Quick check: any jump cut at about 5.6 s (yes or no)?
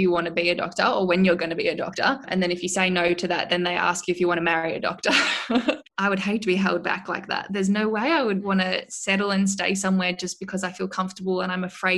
yes